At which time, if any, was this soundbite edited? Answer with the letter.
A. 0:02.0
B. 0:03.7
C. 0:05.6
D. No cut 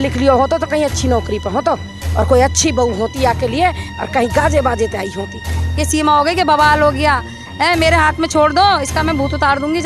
C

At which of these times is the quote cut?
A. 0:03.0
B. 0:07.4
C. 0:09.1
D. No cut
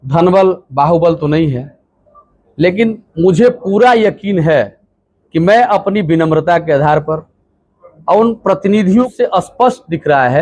C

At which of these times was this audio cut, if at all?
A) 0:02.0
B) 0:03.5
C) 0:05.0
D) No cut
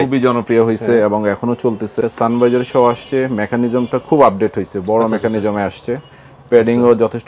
A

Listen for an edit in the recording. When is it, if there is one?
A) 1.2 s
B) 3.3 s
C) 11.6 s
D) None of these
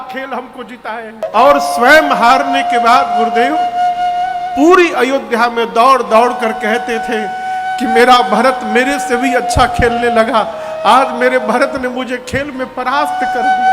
A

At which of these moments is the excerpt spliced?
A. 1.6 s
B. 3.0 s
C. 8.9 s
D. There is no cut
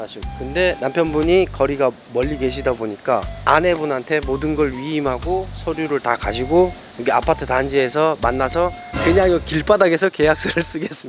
C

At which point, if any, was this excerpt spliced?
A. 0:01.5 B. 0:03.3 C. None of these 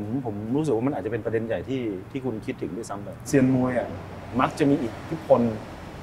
B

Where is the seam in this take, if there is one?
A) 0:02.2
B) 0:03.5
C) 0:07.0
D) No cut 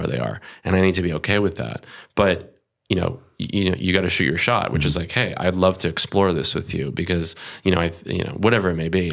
D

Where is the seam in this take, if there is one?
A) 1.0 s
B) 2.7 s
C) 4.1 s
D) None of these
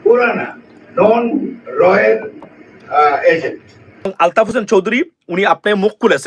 C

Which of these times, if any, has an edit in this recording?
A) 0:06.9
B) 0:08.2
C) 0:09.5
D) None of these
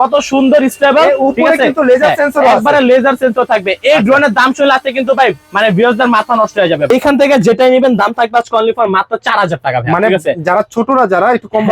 A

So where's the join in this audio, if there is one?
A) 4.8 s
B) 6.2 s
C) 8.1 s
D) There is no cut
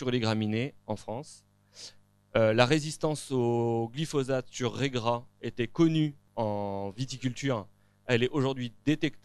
B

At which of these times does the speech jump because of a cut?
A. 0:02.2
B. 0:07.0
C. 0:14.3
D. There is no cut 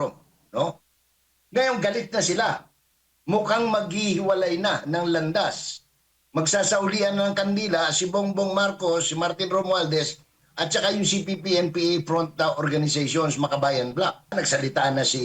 C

